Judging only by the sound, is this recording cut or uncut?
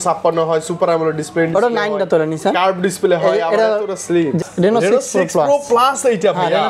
cut